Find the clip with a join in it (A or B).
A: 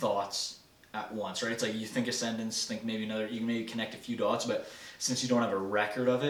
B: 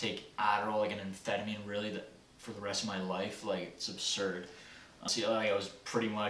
B